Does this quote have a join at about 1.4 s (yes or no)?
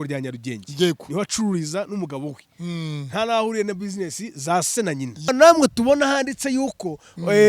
no